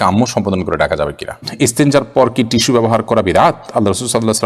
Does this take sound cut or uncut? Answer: cut